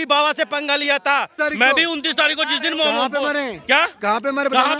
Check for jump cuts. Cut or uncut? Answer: cut